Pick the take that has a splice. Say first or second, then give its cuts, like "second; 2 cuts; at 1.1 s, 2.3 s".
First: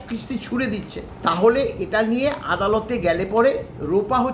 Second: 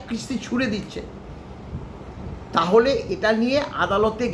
first; 1 cut; at 1.1 s